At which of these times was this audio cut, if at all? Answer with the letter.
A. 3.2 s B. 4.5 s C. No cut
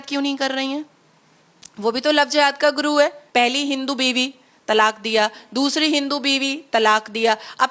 A